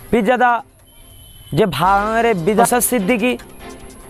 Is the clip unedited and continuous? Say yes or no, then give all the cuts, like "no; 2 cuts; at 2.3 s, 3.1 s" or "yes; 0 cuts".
no; 1 cut; at 2.7 s